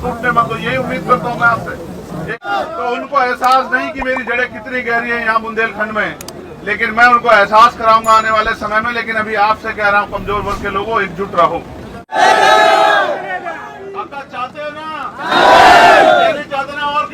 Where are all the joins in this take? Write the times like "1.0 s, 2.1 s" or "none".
2.4 s, 12.2 s